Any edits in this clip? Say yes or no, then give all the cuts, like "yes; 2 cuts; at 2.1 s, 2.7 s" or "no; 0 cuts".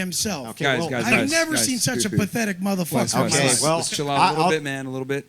no; 0 cuts